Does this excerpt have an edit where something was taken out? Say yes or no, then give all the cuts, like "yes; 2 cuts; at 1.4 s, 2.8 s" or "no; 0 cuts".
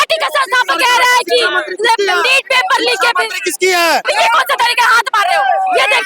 yes; 1 cut; at 4.1 s